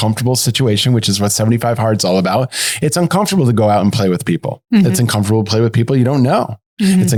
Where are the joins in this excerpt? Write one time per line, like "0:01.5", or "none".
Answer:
none